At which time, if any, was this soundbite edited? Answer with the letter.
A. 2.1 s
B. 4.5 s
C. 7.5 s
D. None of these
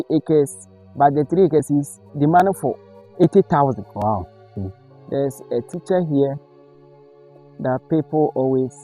B